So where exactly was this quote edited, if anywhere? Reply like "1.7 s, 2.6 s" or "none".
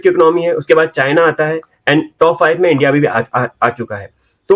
none